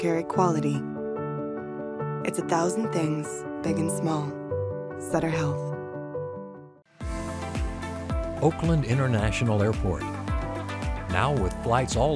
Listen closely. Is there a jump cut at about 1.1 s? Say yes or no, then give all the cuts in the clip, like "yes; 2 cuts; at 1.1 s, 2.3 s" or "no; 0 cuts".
no; 1 cut; at 6.7 s